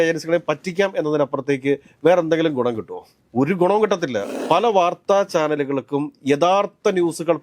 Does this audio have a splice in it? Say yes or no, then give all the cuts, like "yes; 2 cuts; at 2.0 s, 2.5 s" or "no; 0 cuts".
yes; 1 cut; at 4.3 s